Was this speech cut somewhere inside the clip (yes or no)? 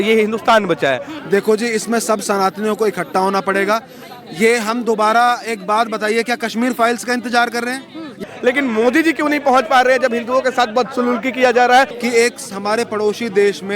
yes